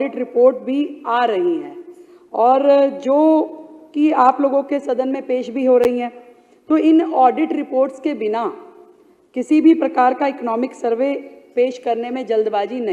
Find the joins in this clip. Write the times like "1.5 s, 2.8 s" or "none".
none

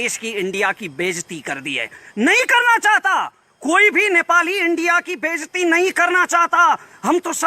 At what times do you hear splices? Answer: 1.9 s

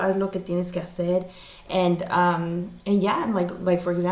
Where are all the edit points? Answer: none

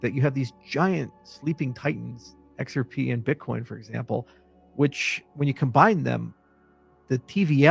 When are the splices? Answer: none

